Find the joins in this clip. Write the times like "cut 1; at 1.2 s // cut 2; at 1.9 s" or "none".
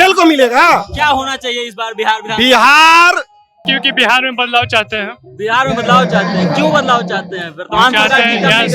cut 1; at 3.7 s